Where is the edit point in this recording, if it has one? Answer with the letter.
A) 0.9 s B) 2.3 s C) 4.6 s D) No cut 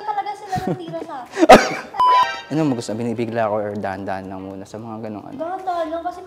B